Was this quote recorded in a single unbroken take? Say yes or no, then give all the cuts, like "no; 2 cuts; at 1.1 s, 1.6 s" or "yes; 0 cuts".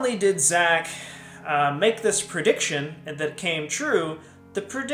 yes; 0 cuts